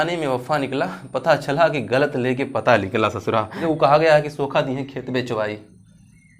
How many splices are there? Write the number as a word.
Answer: one